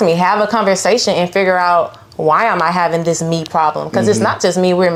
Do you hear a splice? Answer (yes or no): no